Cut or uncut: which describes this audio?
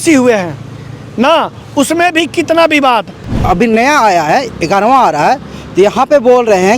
cut